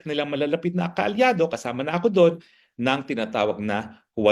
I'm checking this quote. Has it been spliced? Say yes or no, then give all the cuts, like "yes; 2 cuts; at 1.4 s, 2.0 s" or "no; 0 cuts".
no; 0 cuts